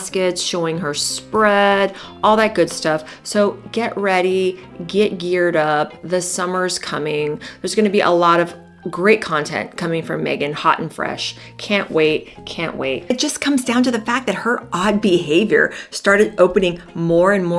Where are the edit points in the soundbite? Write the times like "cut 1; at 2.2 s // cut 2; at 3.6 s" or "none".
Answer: cut 1; at 13.0 s